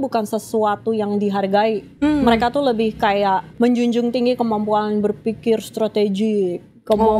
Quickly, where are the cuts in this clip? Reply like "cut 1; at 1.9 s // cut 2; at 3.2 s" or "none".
cut 1; at 1.9 s // cut 2; at 3.5 s